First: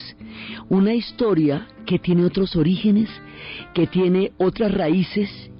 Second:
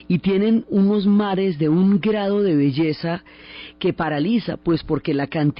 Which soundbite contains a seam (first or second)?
first